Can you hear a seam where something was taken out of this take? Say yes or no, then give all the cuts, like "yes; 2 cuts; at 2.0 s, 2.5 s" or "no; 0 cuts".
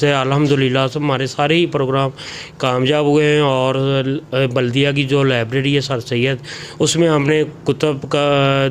no; 0 cuts